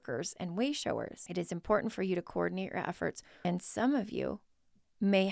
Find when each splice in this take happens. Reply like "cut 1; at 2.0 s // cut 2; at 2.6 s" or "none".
cut 1; at 1.2 s // cut 2; at 3.3 s